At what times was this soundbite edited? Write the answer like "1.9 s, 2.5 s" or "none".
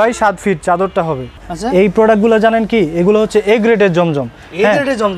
1.4 s